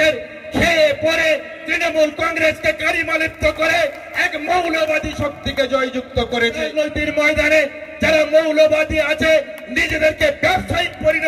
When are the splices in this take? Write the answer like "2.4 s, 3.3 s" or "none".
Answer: 6.7 s